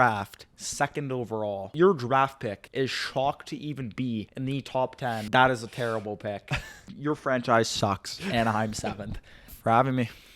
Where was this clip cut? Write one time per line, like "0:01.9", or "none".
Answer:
0:01.7
0:02.6
0:04.3
0:05.3
0:06.8
0:09.5

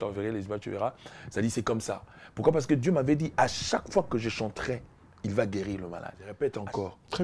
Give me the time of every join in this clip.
0:06.2

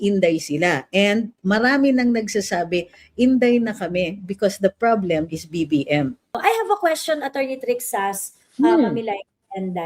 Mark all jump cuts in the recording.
0:06.4

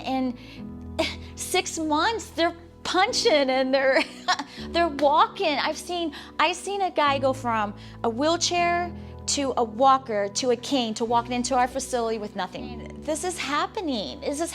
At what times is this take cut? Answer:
0:12.7

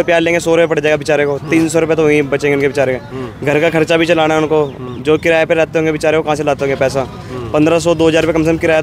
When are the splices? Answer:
none

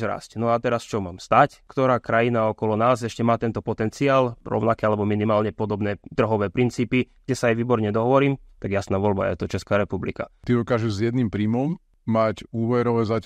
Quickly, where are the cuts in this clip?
0:01.6
0:04.4
0:10.4
0:11.9

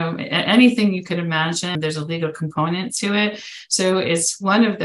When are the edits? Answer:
0:01.8

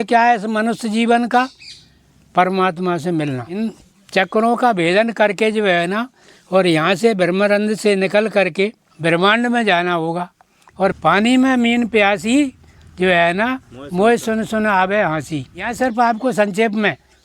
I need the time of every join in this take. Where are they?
0:03.6
0:08.9
0:10.9
0:15.7

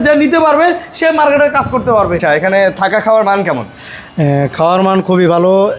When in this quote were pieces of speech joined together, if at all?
0:02.2

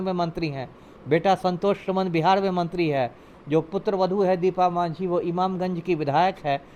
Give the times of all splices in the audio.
none

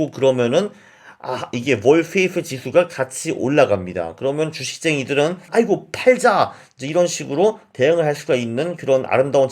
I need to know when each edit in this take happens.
0:05.5

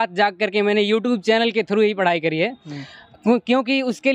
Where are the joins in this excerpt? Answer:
none

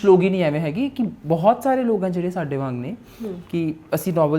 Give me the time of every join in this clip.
none

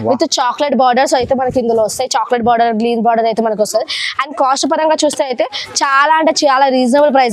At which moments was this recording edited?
none

